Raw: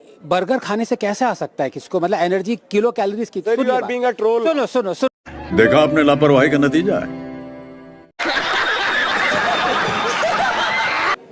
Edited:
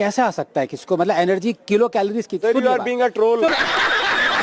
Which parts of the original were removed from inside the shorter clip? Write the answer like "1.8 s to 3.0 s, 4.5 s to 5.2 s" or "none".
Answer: 4.5 s to 8.3 s